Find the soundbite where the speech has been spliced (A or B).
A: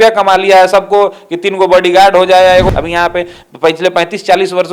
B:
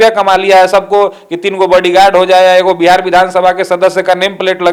A